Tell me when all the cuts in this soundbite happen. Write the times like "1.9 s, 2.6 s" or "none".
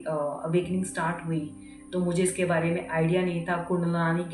none